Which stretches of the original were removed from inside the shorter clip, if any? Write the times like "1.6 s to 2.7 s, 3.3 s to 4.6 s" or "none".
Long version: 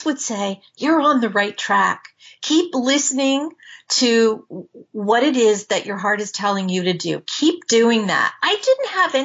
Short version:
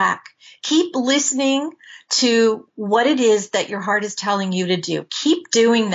4.5 s to 4.9 s

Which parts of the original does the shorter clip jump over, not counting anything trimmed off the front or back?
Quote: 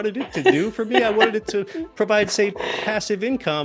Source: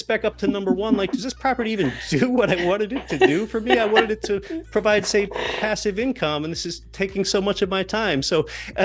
none

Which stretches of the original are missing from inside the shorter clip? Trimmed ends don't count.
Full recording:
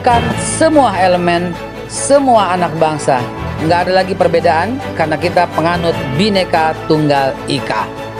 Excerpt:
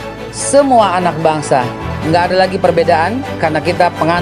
none

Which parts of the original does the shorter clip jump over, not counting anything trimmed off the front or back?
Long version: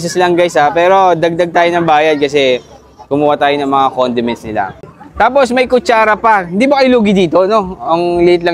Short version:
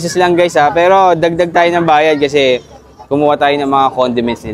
none

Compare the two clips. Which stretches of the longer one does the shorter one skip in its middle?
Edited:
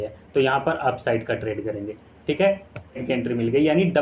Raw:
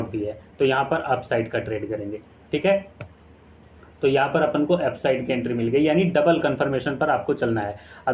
3.3 s to 5.2 s

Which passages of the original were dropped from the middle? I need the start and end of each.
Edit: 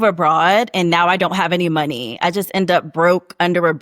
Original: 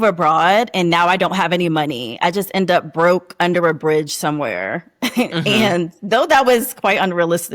none

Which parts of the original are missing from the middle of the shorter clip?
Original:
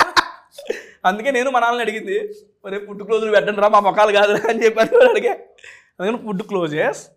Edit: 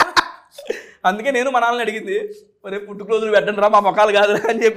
none

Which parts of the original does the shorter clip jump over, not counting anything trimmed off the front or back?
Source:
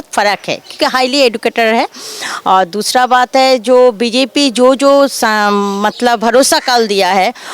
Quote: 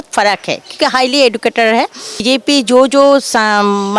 2.2 s to 4.1 s

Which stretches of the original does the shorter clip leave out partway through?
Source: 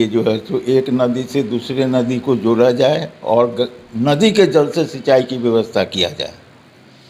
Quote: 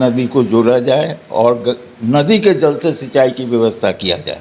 none

